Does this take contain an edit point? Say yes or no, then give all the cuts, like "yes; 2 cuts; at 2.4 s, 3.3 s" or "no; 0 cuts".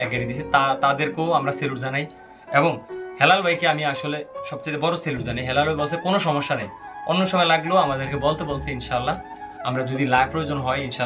no; 0 cuts